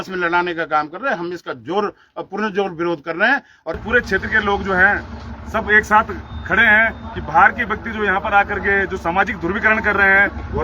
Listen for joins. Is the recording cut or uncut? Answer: cut